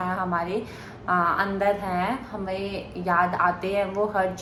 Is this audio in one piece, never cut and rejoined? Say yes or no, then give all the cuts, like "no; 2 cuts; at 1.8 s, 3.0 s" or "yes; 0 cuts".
yes; 0 cuts